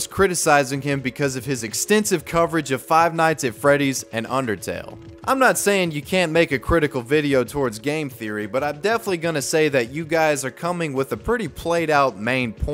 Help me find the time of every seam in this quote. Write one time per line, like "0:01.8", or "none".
none